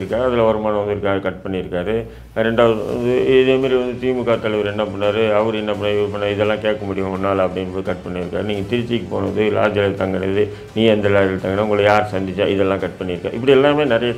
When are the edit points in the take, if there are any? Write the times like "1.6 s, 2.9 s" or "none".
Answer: none